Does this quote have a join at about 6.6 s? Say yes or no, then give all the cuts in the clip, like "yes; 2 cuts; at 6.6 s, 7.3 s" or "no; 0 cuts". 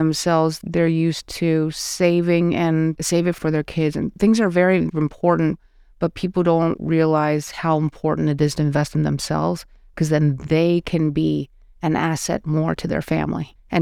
no; 1 cut; at 3.3 s